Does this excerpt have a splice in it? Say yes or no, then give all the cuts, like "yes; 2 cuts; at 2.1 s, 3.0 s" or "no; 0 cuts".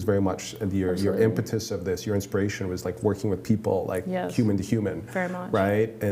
no; 0 cuts